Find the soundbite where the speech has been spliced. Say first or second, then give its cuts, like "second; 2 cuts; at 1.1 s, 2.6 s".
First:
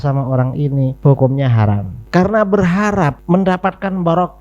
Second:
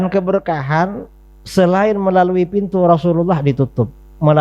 first; 3 cuts; at 0.9 s, 1.9 s, 3.2 s